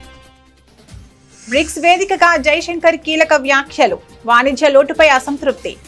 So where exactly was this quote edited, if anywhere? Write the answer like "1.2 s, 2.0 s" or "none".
1.4 s